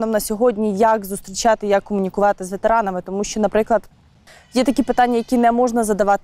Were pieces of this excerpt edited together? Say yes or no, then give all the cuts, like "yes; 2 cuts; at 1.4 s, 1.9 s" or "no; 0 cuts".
no; 0 cuts